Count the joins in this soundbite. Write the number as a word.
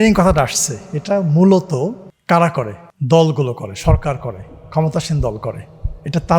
two